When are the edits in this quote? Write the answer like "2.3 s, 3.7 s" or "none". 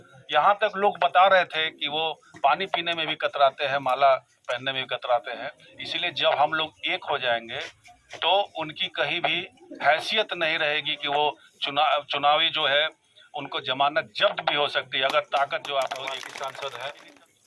16.1 s